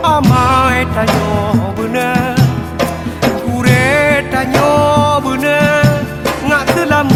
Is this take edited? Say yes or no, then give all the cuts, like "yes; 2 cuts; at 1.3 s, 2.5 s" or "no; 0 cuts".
no; 0 cuts